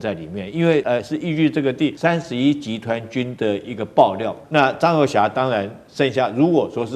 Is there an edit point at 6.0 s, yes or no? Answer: no